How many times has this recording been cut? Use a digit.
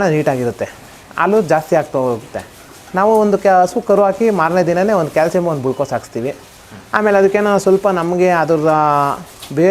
0